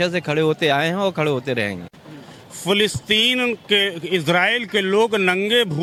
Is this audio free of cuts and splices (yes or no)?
yes